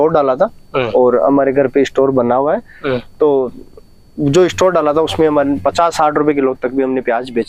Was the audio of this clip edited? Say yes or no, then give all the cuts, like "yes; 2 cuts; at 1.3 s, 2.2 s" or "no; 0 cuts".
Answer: no; 0 cuts